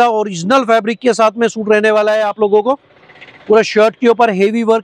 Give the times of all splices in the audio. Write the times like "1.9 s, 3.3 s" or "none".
none